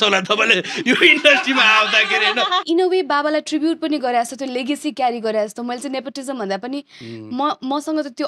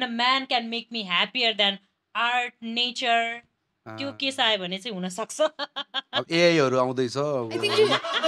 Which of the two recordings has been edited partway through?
first; 1 cut; at 2.6 s

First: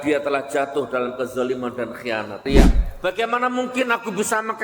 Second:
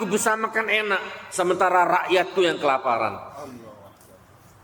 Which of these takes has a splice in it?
first; 1 cut; at 2.5 s

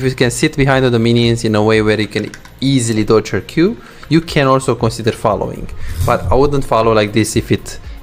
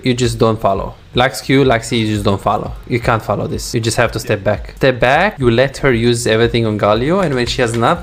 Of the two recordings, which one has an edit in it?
second; 5 cuts; at 1.0 s, 2.8 s, 3.6 s, 4.7 s, 5.4 s

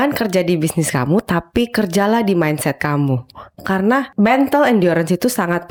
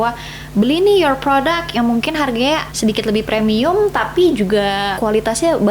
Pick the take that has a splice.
second; 2 cuts; at 2.7 s, 4.9 s

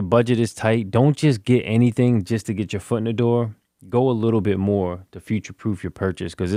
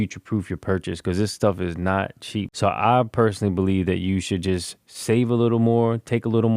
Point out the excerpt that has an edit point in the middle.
second; 1 cut; at 2.5 s

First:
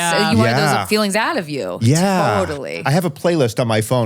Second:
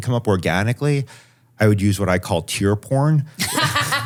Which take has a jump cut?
first; 1 cut; at 2.7 s

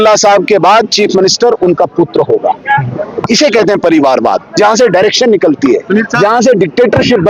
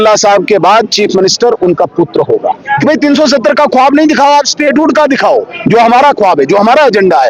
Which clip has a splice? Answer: second; 1 cut; at 2.7 s

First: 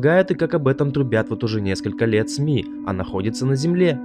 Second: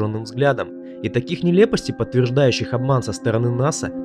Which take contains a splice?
second; 1 cut; at 1.7 s

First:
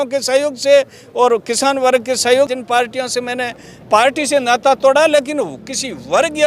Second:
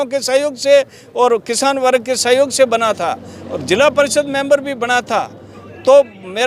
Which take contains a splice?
first; 1 cut; at 2.5 s

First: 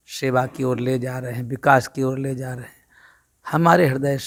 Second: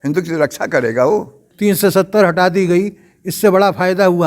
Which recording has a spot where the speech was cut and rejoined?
second; 1 cut; at 1.4 s

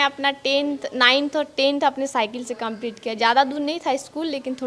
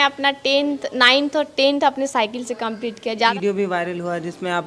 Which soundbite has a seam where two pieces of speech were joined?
second; 1 cut; at 3.3 s

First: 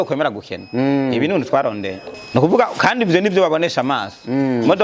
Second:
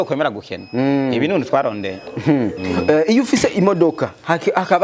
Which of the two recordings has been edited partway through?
first; 1 cut; at 2.1 s

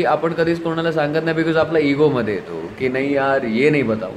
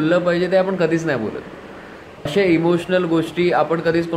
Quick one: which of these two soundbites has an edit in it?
second; 1 cut; at 2.3 s

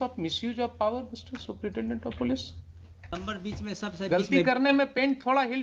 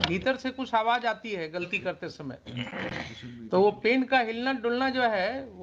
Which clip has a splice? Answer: first; 1 cut; at 3.1 s

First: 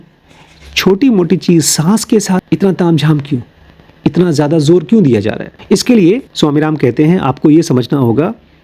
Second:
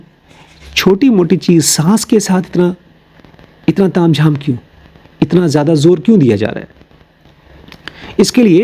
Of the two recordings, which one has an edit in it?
first; 2 cuts; at 2.4 s, 5.5 s

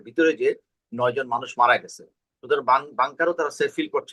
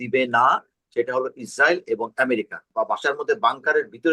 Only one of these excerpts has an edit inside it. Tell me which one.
second; 1 cut; at 2.6 s

